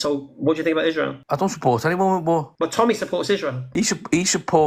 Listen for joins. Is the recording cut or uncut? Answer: cut